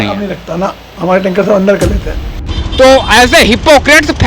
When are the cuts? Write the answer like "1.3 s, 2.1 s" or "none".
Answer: 2.4 s